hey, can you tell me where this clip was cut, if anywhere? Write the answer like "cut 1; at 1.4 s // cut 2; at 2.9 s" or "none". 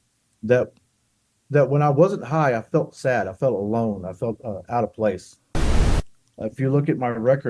cut 1; at 5.7 s

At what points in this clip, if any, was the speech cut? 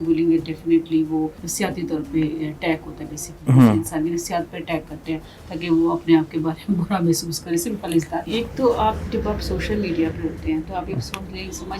cut 1; at 1.4 s // cut 2; at 8.3 s

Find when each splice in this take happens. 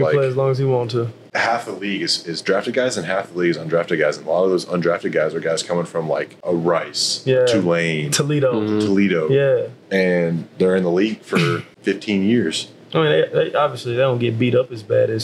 cut 1; at 1.2 s // cut 2; at 6.3 s // cut 3; at 11.7 s

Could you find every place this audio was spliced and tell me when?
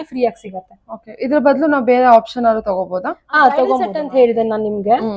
cut 1; at 4.0 s

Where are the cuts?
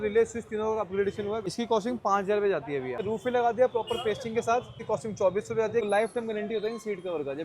cut 1; at 1.5 s // cut 2; at 3.0 s // cut 3; at 4.8 s // cut 4; at 5.9 s

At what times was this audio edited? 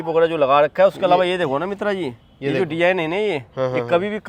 none

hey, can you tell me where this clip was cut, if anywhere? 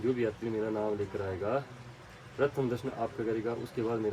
none

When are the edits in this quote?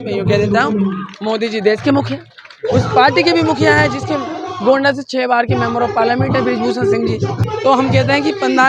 cut 1; at 7.5 s

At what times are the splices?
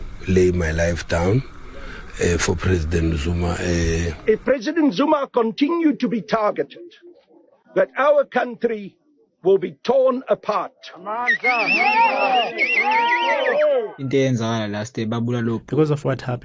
cut 1; at 4.1 s // cut 2; at 14.0 s

